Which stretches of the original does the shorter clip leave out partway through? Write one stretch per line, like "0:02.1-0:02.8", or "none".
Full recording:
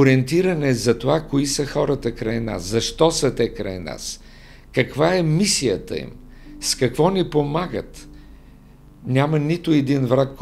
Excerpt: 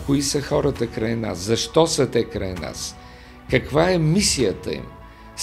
none